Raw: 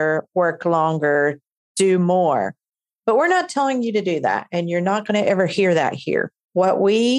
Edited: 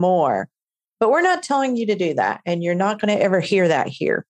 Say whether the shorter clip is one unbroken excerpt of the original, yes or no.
yes